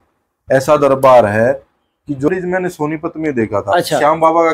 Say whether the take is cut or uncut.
cut